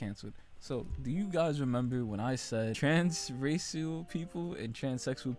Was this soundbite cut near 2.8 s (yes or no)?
yes